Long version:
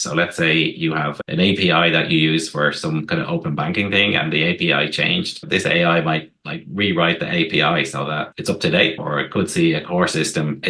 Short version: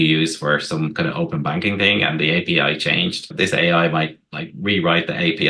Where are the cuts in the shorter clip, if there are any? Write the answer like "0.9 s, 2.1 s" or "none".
none